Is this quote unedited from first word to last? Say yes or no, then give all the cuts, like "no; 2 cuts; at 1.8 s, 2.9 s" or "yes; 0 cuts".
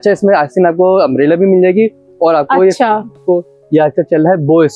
no; 1 cut; at 3.2 s